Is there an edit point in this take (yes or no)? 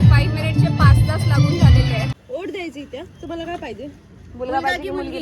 yes